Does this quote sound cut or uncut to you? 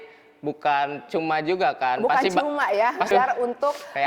cut